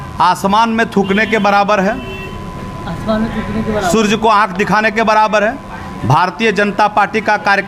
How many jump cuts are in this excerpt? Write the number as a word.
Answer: zero